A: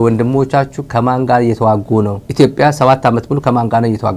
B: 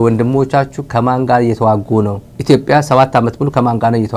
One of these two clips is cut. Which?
A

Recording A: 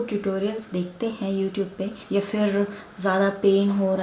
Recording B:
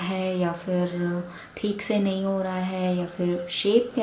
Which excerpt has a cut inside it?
A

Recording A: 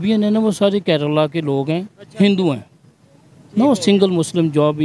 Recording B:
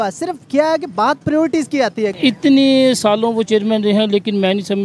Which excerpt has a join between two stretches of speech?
B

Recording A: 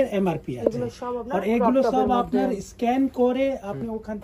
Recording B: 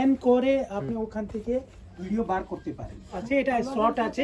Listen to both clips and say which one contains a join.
B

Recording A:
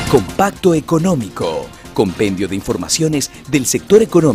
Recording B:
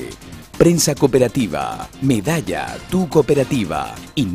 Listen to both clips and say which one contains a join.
A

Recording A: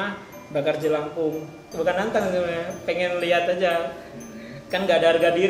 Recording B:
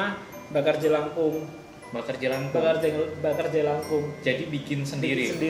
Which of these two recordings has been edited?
A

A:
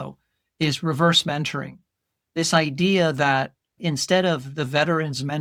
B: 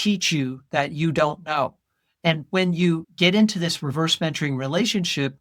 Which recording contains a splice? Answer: B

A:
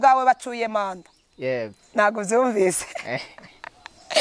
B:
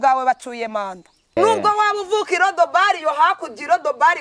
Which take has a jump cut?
B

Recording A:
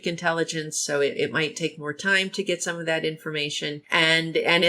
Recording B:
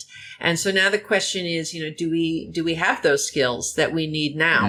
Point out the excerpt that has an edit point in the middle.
A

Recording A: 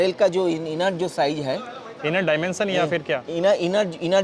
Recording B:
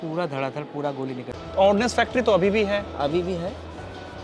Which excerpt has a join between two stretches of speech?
B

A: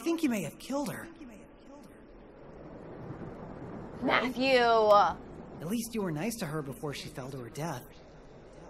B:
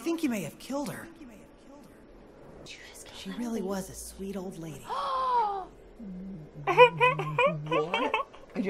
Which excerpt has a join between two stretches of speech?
B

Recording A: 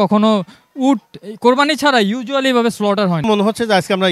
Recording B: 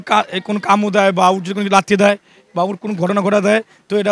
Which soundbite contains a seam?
A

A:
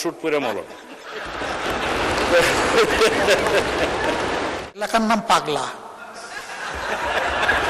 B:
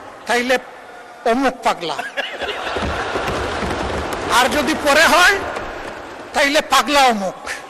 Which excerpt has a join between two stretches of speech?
A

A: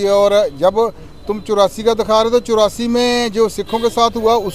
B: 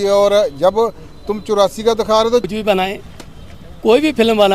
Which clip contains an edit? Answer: B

